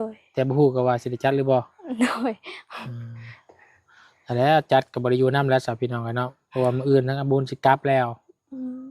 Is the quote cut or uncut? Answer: uncut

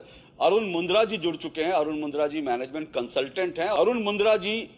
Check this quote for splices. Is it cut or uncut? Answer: cut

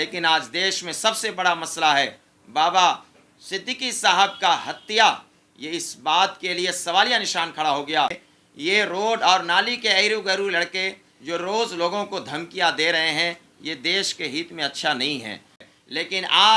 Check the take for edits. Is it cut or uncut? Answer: cut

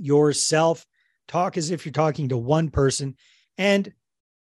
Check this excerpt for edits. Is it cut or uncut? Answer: uncut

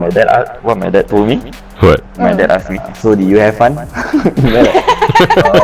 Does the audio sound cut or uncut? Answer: cut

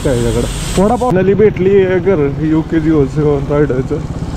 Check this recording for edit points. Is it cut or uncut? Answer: cut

